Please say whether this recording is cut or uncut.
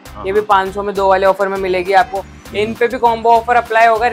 cut